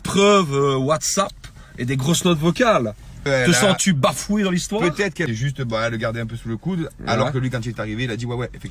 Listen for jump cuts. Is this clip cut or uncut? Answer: cut